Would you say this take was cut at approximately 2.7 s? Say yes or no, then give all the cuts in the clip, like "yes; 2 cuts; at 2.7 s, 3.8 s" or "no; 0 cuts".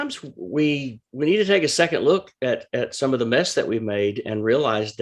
no; 1 cut; at 1.0 s